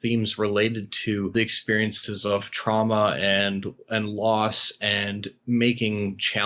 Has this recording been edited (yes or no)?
yes